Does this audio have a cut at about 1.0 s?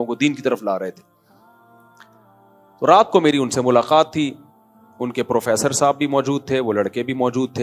yes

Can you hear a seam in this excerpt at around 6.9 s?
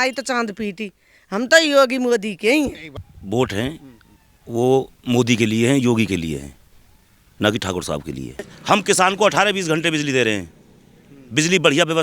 no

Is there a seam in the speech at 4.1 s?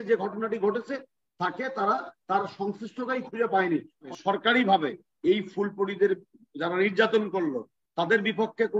yes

